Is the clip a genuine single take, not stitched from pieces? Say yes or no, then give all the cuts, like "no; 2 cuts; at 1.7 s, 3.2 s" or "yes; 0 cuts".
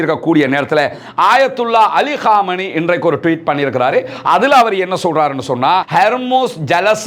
no; 1 cut; at 5.8 s